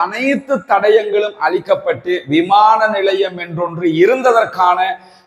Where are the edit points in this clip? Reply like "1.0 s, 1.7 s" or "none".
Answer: none